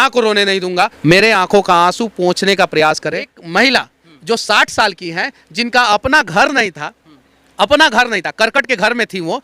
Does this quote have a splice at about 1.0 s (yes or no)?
yes